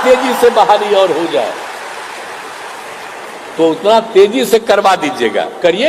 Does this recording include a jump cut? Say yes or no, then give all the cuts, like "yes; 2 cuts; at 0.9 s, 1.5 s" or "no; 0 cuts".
no; 0 cuts